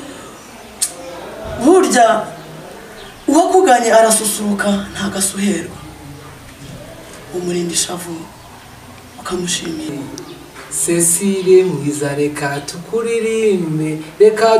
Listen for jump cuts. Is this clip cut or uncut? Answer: cut